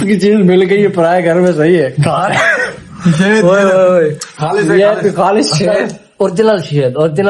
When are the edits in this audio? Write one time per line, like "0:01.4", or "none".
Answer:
none